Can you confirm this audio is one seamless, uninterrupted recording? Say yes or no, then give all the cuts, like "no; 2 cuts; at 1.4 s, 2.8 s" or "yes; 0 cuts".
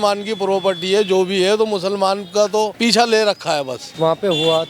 no; 2 cuts; at 2.7 s, 3.8 s